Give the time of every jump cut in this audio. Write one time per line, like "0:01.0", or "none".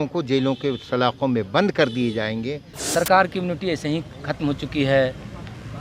0:02.7